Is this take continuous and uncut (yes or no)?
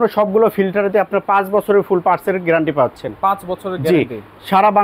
yes